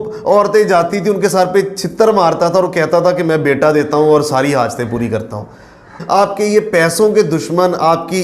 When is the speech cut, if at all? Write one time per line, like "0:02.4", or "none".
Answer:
0:05.9